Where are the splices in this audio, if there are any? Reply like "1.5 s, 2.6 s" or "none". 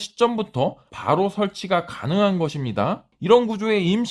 3.1 s